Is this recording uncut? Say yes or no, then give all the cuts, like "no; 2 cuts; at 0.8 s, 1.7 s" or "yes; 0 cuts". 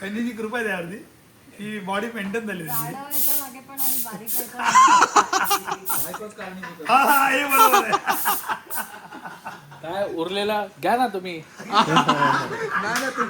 yes; 0 cuts